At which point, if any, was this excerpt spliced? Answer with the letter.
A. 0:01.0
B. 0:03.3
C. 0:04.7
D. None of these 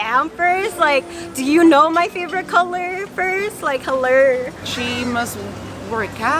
C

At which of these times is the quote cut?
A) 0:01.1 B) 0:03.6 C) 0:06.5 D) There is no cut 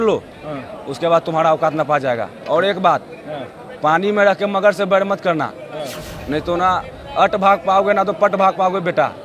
D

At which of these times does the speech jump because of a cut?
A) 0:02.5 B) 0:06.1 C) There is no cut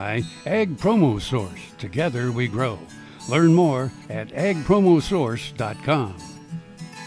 B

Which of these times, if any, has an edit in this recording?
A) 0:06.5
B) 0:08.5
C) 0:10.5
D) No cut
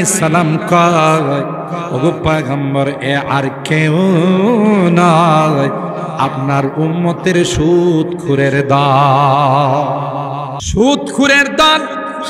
C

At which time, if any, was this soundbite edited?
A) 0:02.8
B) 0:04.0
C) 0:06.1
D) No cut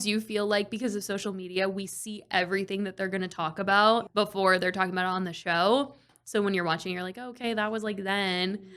B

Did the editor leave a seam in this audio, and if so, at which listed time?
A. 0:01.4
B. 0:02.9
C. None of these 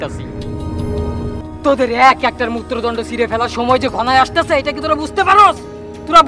A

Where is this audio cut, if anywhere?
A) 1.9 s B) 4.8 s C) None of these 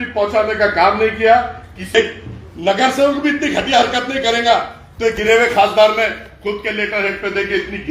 A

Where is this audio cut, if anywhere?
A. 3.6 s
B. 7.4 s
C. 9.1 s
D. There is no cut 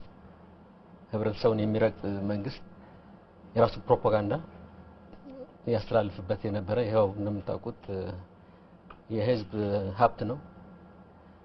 B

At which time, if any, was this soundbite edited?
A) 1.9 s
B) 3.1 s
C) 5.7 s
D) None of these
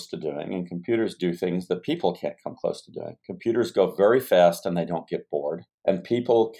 C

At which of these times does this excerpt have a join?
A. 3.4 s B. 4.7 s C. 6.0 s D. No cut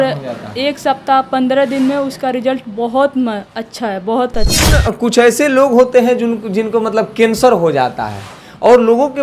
B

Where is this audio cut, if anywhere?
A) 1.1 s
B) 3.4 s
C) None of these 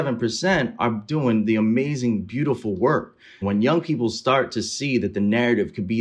B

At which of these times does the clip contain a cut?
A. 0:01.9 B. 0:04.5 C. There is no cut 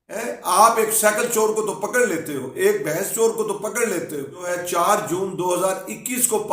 B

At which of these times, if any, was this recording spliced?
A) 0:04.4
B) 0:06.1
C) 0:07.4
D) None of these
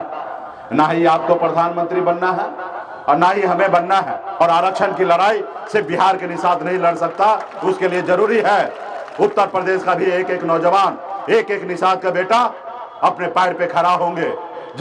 A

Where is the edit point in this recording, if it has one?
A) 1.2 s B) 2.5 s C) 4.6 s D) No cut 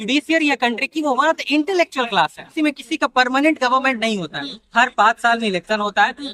B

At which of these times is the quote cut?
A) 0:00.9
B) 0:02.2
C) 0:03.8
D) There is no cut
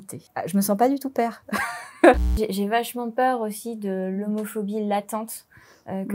B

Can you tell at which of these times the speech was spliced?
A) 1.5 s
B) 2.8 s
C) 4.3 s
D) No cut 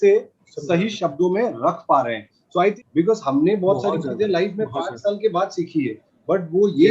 B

